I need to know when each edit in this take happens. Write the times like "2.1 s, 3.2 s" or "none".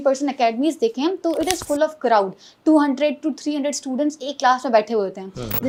none